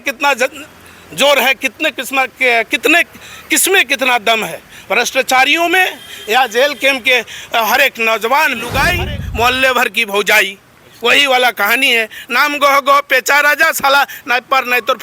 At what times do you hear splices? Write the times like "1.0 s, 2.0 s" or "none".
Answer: 8.6 s